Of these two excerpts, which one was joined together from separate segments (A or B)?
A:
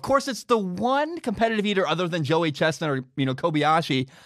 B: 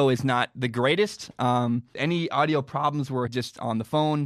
B